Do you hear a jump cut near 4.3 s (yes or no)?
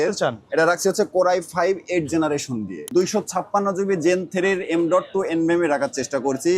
no